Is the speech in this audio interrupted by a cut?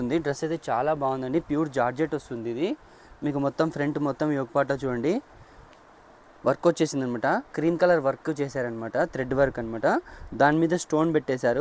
no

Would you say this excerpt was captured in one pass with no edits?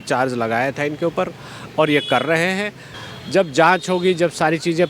no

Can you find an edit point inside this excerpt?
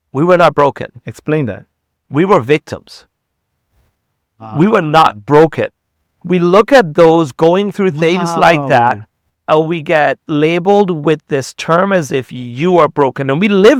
no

